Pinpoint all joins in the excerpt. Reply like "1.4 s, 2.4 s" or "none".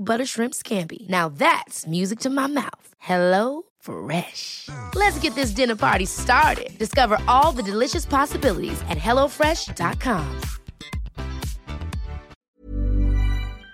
12.3 s